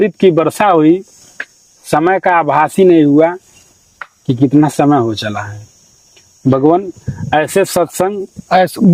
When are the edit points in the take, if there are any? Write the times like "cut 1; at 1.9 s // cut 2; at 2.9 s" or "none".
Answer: none

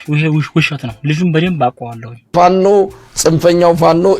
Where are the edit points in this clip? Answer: cut 1; at 2.3 s

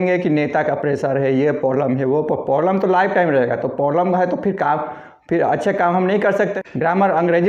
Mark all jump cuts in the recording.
cut 1; at 6.5 s

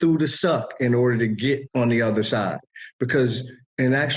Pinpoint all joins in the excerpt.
cut 1; at 1.7 s

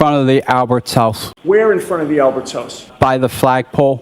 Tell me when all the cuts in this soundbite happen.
cut 1; at 1.3 s

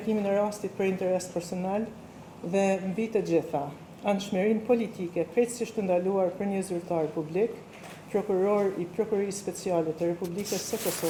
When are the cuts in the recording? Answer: none

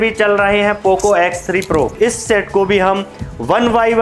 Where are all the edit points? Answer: cut 1; at 1.9 s

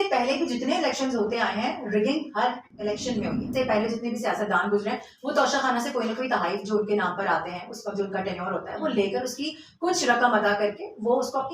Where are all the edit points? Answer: cut 1; at 3.4 s

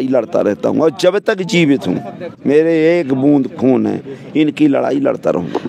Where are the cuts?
none

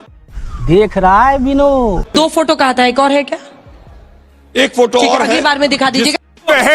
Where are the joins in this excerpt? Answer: cut 1; at 2.1 s

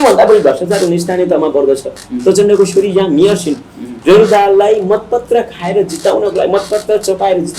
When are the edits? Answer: none

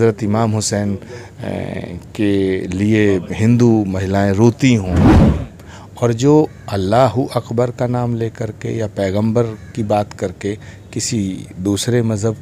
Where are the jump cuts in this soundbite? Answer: cut 1; at 5.1 s

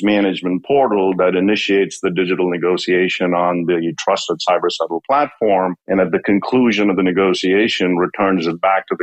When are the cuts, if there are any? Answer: none

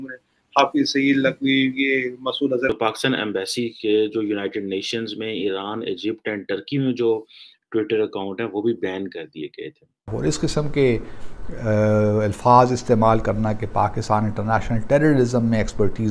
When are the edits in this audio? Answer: cut 1; at 2.7 s // cut 2; at 10.1 s

